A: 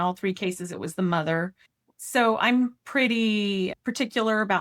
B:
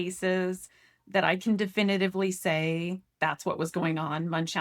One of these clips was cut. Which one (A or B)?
A